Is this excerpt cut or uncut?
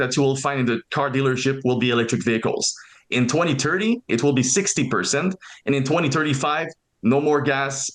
uncut